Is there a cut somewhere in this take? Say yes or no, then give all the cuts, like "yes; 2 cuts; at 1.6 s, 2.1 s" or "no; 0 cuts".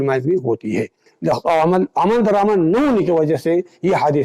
yes; 1 cut; at 1.1 s